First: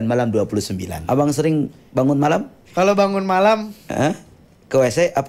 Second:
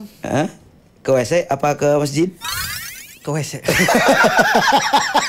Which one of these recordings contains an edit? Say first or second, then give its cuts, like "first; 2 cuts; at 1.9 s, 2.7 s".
first; 2 cuts; at 0.9 s, 2.6 s